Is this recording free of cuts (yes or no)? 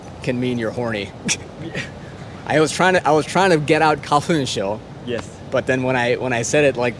yes